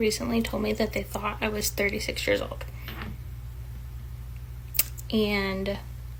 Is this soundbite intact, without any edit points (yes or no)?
yes